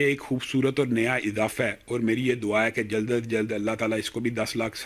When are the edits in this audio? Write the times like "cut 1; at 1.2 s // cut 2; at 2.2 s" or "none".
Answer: none